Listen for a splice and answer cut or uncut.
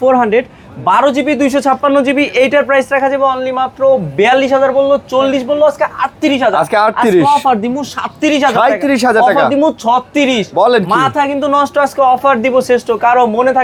uncut